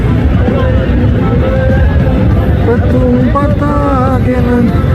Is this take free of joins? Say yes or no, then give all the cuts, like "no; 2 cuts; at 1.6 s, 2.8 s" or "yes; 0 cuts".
yes; 0 cuts